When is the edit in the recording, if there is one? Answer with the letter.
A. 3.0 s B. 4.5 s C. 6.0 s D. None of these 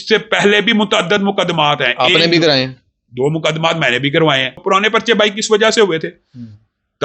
B